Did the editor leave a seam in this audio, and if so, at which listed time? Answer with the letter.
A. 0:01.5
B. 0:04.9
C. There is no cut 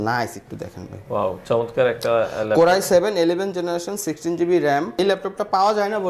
B